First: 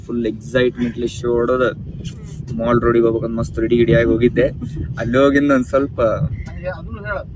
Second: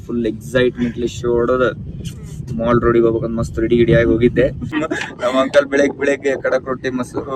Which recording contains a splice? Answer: second; 1 cut; at 4.8 s

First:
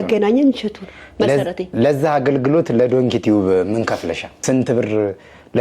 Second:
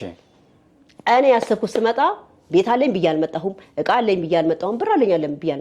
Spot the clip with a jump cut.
first; 1 cut; at 4.4 s

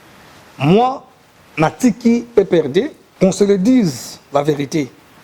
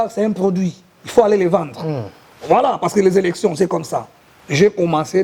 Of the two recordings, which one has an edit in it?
first; 1 cut; at 3.0 s

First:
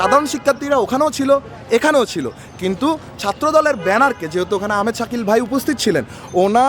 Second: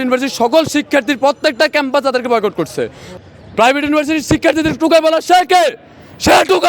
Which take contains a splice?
second; 1 cut; at 3.1 s

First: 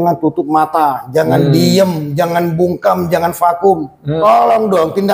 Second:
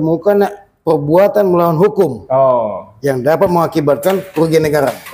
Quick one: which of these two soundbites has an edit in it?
first; 1 cut; at 4.0 s

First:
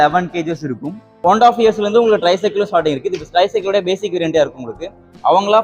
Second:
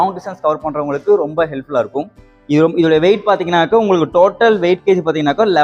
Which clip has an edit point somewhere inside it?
first; 1 cut; at 1.2 s

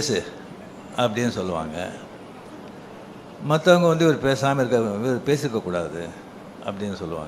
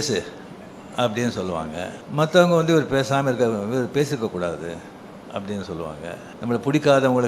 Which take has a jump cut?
second; 2 cuts; at 2.0 s, 6.3 s

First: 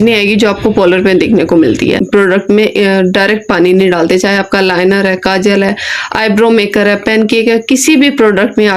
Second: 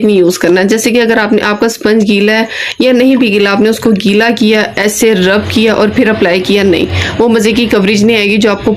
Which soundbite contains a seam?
first; 1 cut; at 2.0 s

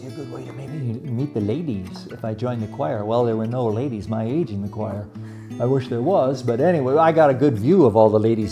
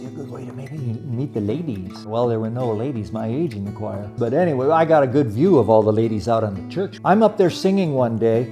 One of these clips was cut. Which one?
second; 3 cuts; at 2.1 s, 4.1 s, 6.9 s

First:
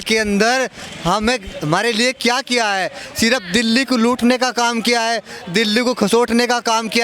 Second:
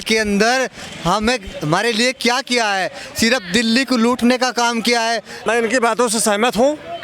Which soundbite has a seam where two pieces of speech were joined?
second; 1 cut; at 5.3 s

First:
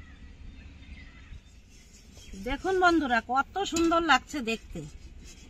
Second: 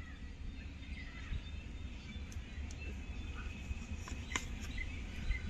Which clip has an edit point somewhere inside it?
first; 1 cut; at 1.5 s

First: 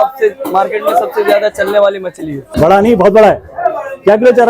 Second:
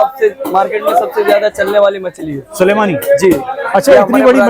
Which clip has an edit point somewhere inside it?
first; 1 cut; at 2.5 s

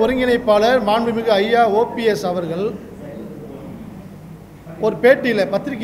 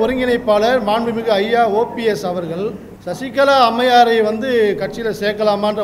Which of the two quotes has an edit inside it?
second; 1 cut; at 2.9 s

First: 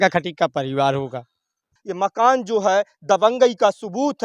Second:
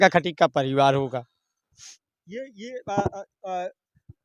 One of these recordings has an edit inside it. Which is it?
first; 1 cut; at 1.8 s

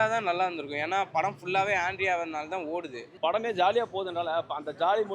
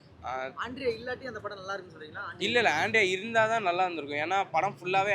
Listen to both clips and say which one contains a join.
first; 1 cut; at 3.0 s

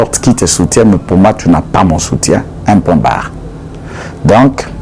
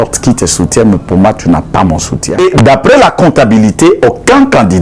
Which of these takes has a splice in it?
second; 1 cut; at 2.2 s

